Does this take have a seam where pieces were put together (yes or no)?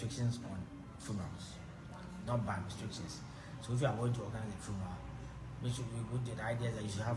no